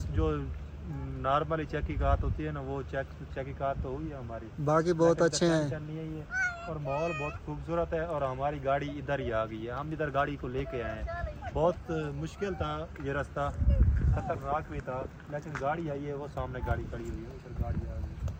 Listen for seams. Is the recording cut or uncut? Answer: uncut